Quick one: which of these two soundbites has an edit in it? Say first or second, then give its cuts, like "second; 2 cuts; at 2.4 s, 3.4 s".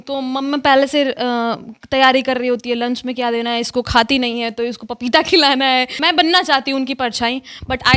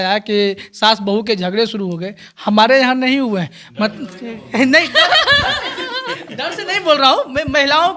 first; 1 cut; at 5.9 s